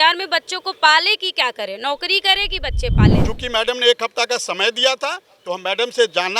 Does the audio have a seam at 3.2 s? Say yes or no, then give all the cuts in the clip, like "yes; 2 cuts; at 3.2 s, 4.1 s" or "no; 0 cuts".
yes; 1 cut; at 3.2 s